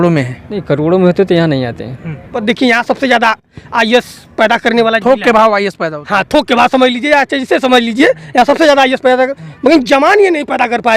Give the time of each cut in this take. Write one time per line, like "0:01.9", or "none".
0:02.3